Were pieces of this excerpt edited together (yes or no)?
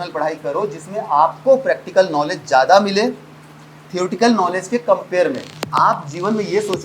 yes